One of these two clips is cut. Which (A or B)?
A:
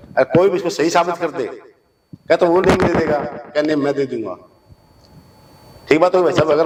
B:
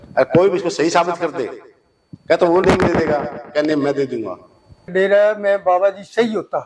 B